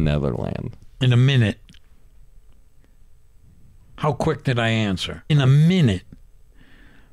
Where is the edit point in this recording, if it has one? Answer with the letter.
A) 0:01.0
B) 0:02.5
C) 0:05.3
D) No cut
C